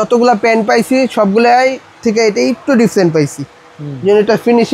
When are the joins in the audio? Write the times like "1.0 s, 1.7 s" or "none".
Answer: none